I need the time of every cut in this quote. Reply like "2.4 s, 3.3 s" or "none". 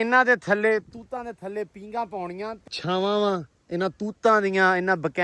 2.8 s